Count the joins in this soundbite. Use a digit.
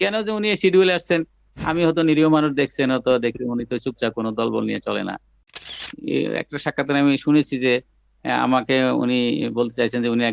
1